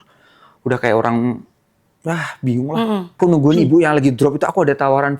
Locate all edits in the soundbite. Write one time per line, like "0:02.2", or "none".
0:03.2